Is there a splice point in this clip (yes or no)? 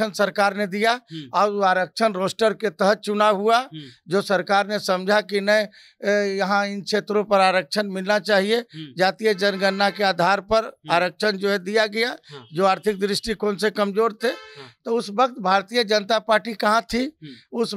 no